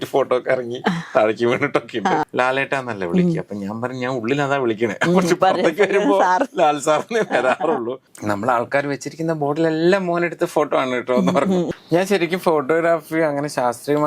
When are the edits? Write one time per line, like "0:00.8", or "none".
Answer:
0:02.2
0:08.1
0:11.7